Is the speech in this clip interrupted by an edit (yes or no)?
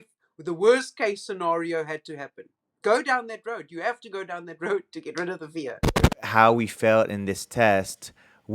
yes